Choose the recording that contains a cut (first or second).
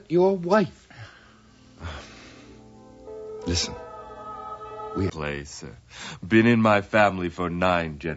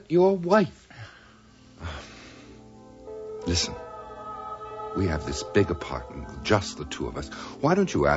second